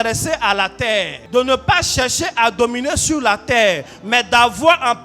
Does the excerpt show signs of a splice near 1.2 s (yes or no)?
yes